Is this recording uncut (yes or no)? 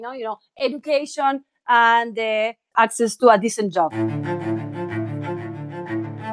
no